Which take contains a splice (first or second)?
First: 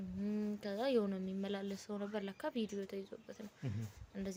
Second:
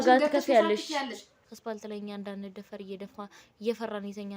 second